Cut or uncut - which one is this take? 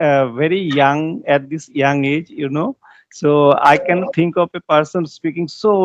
uncut